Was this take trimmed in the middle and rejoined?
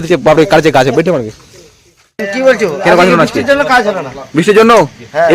yes; 1 cut; at 2.2 s

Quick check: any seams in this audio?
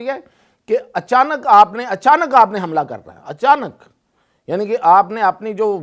no; 0 cuts

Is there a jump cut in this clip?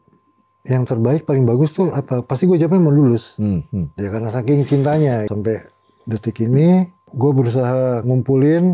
yes; 2 cuts; at 5.3 s, 7.0 s

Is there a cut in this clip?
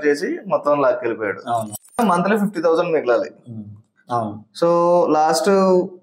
yes; 1 cut; at 2.0 s

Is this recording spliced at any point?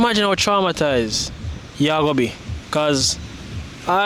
no; 0 cuts

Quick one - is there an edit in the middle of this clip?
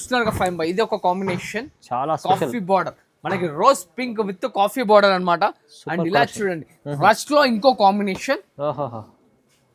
no; 0 cuts

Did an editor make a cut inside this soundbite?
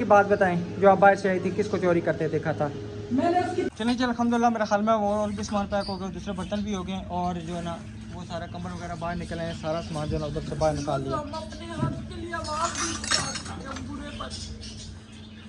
yes; 1 cut; at 3.7 s

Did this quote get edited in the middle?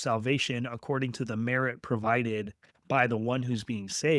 no; 0 cuts

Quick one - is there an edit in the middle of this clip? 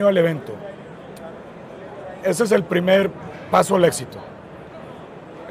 no; 0 cuts

